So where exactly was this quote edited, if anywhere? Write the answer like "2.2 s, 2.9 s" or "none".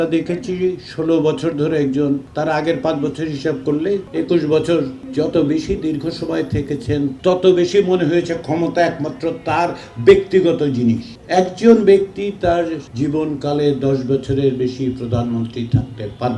2.3 s, 4.1 s, 5.0 s, 7.1 s, 11.1 s, 12.8 s